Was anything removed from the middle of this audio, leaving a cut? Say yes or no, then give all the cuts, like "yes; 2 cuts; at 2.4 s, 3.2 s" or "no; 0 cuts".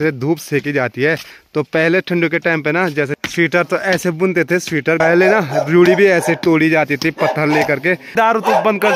yes; 3 cuts; at 3.2 s, 5.0 s, 8.1 s